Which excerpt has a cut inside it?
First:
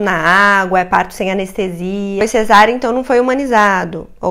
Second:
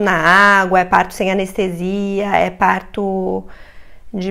first; 1 cut; at 2.2 s

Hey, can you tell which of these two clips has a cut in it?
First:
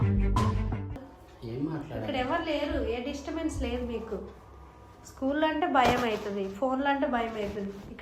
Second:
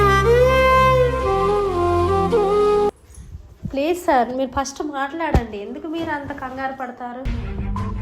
second; 1 cut; at 2.9 s

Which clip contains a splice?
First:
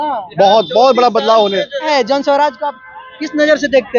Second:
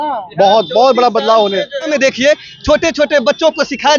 second; 1 cut; at 1.9 s

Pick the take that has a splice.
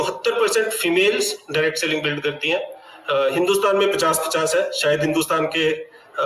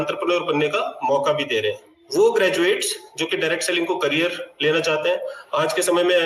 second; 1 cut; at 2.0 s

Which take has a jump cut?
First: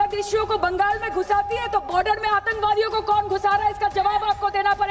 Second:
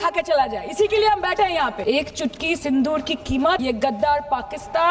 second; 2 cuts; at 1.8 s, 3.6 s

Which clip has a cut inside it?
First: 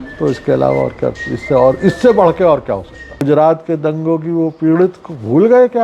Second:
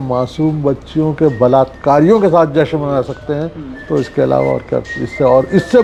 first; 1 cut; at 3.2 s

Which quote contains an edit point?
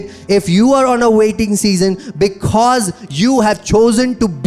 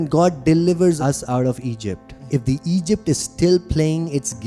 second; 2 cuts; at 1.0 s, 2.1 s

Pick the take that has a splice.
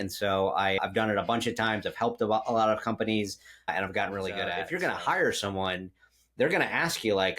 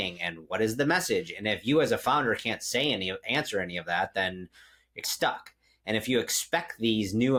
first; 1 cut; at 4.6 s

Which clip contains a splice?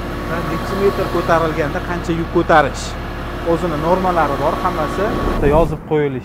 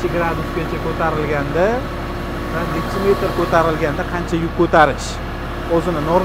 first; 1 cut; at 5.3 s

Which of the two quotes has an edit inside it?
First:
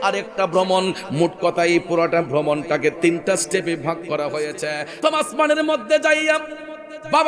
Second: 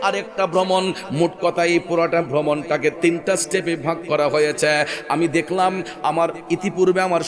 first; 1 cut; at 5.0 s

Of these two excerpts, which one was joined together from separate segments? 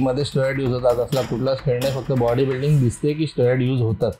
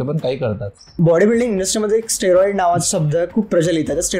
second; 1 cut; at 0.9 s

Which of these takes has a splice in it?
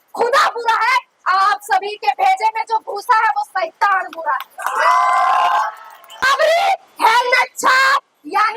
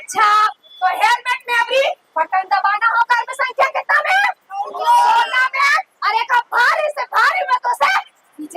first; 1 cut; at 6.3 s

